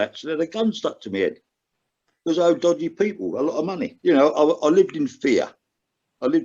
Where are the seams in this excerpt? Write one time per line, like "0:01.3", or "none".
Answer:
0:03.9